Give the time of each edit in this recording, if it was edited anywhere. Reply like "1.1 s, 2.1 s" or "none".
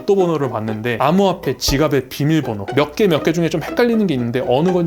1.0 s

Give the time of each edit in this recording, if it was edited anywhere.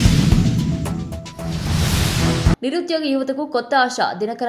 2.6 s

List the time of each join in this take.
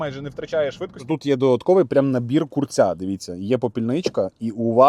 0.9 s

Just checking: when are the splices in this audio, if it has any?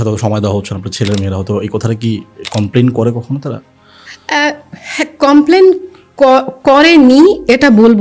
none

